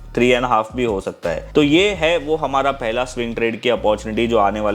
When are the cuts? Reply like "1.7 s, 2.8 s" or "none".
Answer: 1.4 s